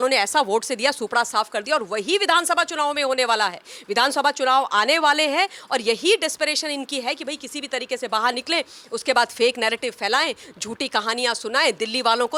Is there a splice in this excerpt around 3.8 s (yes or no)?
no